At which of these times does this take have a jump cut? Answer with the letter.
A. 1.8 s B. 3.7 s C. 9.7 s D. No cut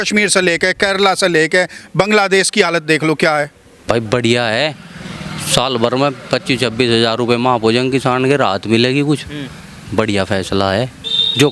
B